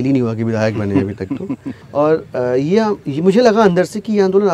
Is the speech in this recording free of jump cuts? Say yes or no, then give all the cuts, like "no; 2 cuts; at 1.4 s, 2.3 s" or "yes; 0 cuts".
no; 1 cut; at 1.8 s